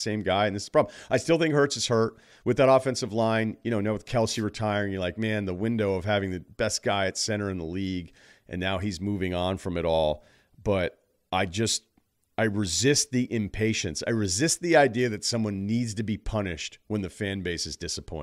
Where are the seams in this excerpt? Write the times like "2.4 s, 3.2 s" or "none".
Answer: none